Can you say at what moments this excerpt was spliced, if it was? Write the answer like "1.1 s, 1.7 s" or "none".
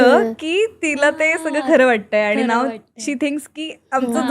none